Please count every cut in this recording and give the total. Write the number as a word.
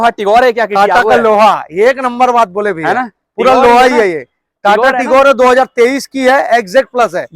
zero